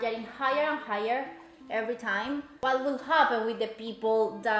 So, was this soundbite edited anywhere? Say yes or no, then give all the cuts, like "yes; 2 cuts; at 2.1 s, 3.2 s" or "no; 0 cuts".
yes; 1 cut; at 2.5 s